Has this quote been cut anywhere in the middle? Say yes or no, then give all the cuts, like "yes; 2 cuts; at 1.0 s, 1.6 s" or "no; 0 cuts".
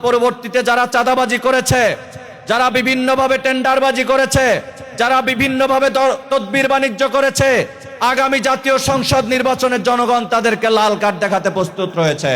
no; 0 cuts